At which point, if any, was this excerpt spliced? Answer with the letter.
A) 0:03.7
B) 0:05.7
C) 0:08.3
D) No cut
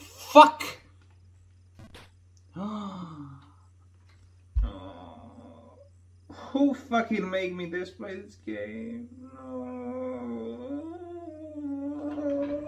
D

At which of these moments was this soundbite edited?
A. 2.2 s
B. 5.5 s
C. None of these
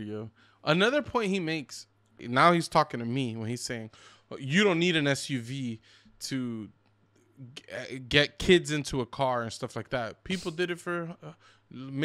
A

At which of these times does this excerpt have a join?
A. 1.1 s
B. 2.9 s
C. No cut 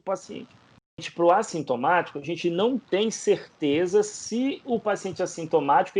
A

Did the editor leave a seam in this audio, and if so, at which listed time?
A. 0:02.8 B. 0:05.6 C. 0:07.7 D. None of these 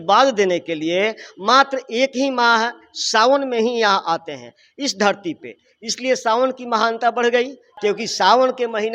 C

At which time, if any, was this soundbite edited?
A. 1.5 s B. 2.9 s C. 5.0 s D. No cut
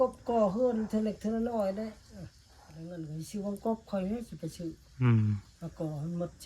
B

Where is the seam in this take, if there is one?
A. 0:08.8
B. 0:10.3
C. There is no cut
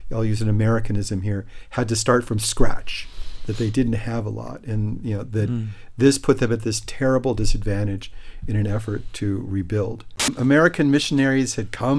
B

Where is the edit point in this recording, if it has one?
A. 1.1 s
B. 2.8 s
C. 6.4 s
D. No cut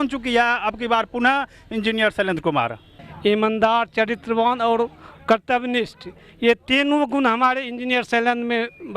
B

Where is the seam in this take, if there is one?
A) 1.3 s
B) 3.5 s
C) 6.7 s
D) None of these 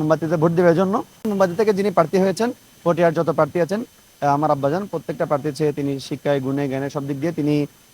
A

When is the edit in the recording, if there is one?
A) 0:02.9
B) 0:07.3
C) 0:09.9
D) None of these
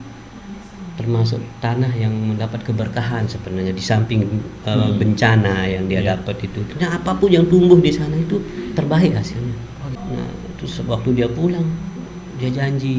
C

